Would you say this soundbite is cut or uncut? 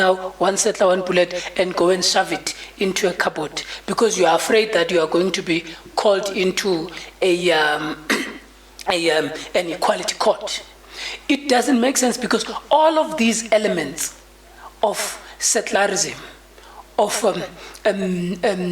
uncut